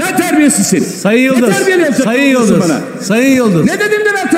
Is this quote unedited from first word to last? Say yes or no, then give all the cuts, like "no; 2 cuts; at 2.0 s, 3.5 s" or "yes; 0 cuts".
yes; 0 cuts